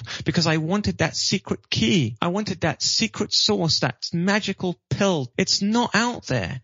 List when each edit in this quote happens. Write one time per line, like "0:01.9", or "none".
0:02.1
0:05.3